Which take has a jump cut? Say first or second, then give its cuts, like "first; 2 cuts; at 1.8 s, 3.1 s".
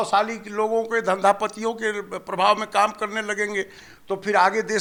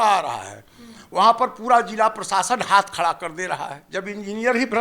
second; 1 cut; at 3.8 s